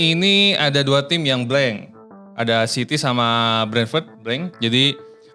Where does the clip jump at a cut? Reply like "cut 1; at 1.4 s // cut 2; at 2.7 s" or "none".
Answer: none